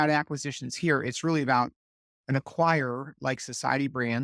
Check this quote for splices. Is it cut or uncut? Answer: uncut